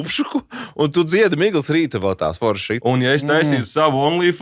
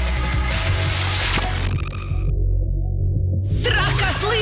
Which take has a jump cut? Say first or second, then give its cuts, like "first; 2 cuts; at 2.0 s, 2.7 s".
first; 1 cut; at 2.7 s